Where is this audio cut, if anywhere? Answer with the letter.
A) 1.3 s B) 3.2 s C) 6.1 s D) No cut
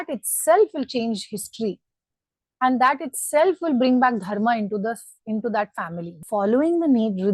C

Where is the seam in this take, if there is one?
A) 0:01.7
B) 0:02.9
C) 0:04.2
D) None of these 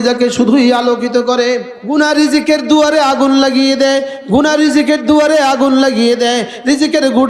A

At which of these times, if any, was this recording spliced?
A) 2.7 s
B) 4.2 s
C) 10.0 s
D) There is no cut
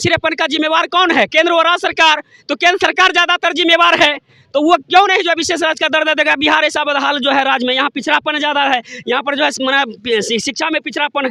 D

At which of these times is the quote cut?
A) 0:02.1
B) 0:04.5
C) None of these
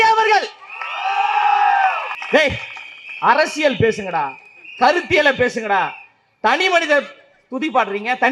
A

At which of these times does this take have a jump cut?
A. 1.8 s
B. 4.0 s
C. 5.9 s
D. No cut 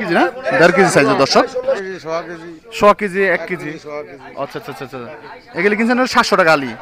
A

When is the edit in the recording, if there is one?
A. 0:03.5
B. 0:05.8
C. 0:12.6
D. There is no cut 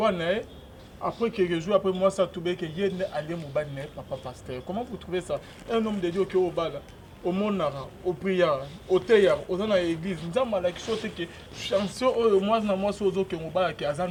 D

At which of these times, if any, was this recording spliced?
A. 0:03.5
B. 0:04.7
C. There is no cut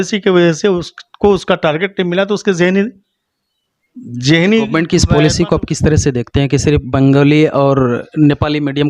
B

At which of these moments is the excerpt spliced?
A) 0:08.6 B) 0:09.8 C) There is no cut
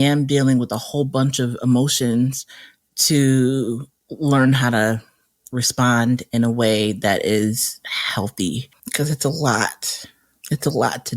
A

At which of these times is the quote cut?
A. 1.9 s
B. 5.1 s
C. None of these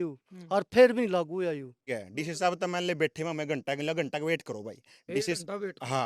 A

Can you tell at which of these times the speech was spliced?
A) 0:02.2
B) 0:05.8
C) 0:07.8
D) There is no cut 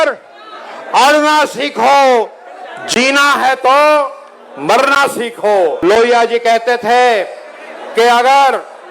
B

